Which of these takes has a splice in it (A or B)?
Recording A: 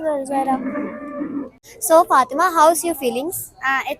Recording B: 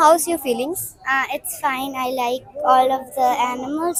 A